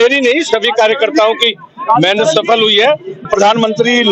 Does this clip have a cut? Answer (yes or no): yes